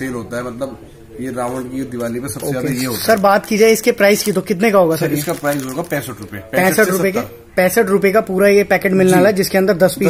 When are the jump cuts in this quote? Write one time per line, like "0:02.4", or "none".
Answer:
none